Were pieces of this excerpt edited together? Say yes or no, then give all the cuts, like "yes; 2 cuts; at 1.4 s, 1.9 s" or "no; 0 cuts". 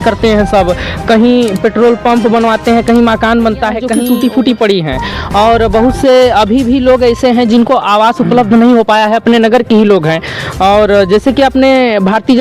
yes; 1 cut; at 4.0 s